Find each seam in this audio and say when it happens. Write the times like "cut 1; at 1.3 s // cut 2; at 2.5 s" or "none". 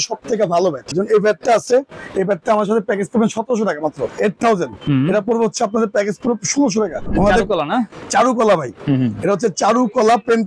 cut 1; at 0.9 s // cut 2; at 4.1 s // cut 3; at 7.1 s // cut 4; at 8.0 s